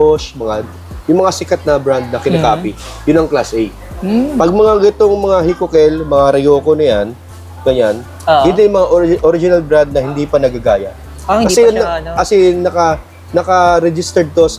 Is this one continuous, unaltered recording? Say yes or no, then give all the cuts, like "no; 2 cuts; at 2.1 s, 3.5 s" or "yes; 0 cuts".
yes; 0 cuts